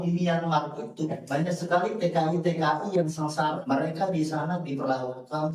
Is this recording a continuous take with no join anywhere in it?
no; 1 cut; at 3.6 s

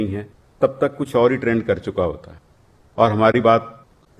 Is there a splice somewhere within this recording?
no; 0 cuts

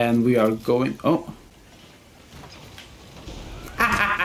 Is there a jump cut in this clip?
no; 0 cuts

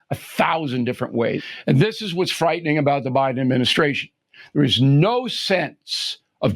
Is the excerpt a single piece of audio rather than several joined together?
no; 1 cut; at 1.5 s

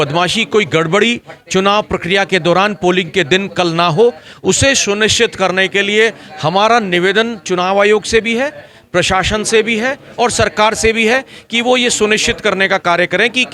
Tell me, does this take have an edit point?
no; 0 cuts

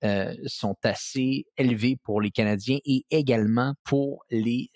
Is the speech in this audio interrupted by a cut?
yes; 1 cut; at 3.8 s

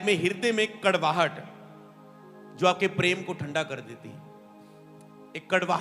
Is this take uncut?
yes; 0 cuts

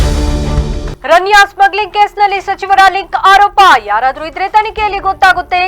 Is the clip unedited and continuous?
no; 1 cut; at 0.9 s

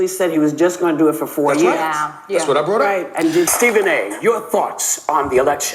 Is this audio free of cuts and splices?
no; 1 cut; at 3.5 s

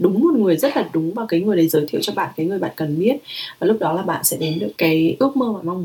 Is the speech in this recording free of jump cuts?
no; 1 cut; at 4.7 s

